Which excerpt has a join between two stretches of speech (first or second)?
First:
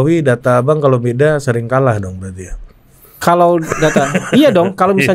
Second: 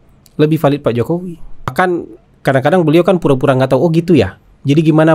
second